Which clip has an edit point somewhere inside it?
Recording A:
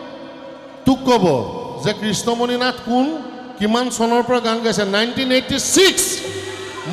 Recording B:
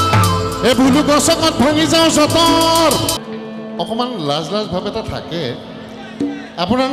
B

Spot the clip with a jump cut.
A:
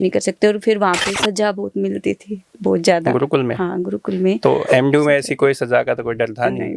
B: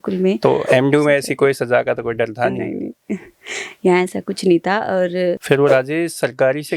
B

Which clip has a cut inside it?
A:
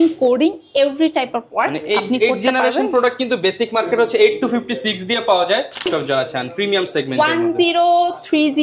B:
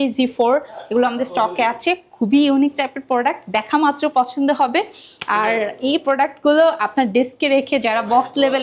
A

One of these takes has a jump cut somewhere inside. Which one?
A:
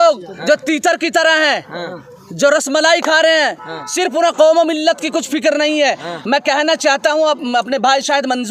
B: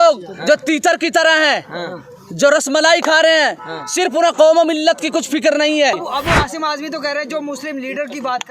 B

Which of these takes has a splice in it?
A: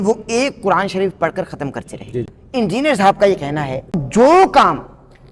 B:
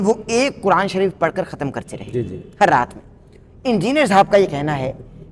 A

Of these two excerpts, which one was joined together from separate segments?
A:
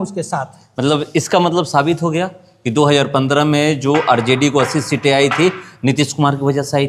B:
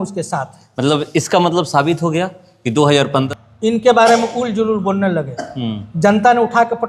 B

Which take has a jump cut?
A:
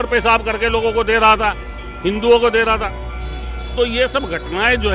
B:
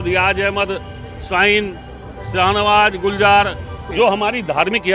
B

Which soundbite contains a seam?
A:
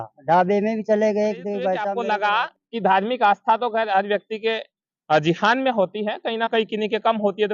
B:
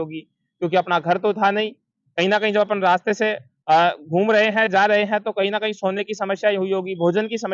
A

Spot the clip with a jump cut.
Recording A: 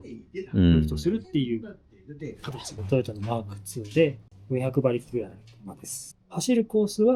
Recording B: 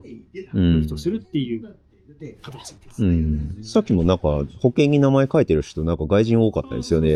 A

